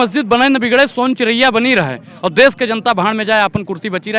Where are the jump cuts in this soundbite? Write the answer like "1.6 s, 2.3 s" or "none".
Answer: none